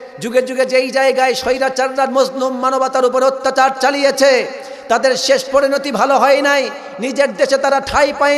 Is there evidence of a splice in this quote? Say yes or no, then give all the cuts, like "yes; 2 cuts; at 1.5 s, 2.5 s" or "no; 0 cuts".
no; 0 cuts